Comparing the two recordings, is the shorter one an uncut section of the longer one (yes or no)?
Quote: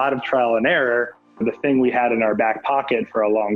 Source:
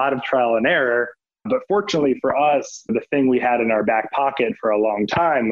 no